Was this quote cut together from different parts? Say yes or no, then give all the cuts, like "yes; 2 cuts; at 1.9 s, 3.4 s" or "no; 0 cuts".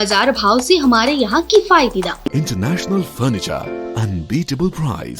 yes; 1 cut; at 2.3 s